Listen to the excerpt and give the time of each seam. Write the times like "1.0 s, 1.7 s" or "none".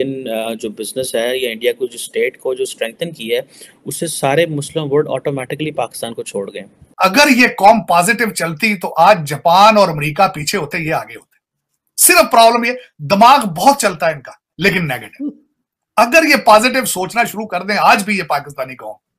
6.9 s